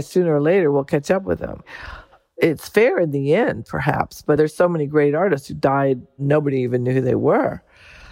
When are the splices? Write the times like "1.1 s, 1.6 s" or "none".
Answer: 2.4 s, 4.4 s, 6.2 s